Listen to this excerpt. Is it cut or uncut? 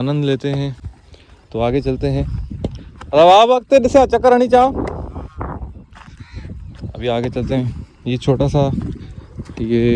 uncut